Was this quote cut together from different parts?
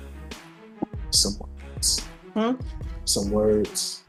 no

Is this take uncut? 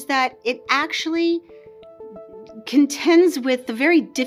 yes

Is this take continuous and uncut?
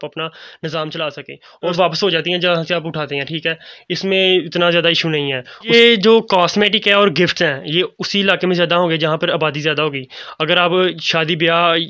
no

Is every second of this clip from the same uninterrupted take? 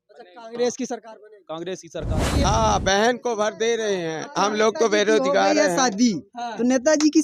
no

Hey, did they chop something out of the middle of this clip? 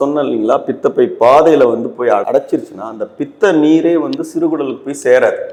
no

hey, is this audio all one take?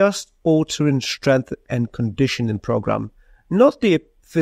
yes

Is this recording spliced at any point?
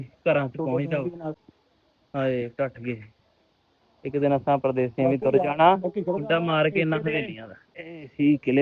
yes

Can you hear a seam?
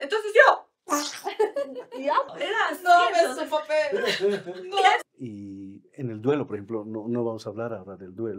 yes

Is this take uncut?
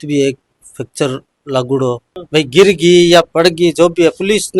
no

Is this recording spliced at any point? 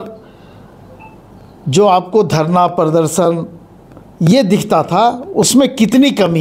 no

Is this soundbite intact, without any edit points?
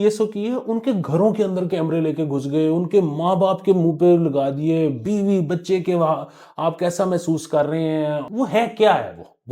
no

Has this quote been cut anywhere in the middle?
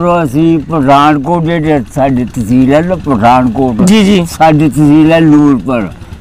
no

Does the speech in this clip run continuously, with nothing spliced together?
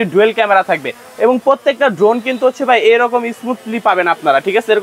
yes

